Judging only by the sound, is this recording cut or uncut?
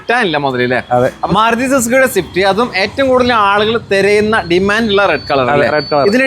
cut